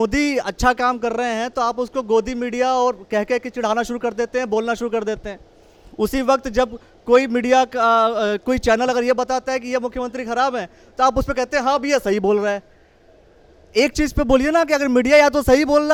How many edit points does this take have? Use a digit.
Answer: 0